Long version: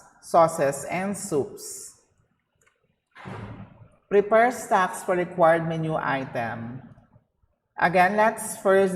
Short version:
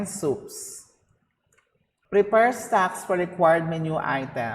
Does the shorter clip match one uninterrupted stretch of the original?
no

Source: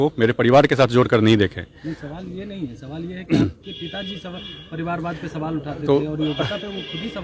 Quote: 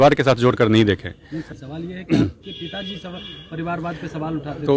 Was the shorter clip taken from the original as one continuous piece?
no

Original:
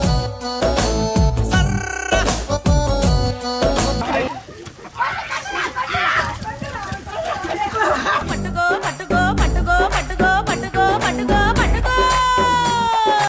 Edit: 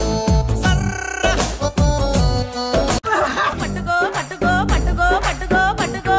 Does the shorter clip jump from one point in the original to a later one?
yes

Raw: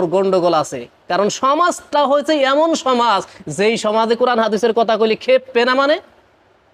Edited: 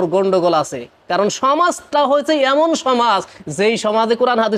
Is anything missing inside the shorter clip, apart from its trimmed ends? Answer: no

